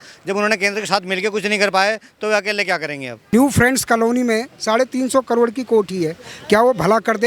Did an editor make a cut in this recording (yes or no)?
yes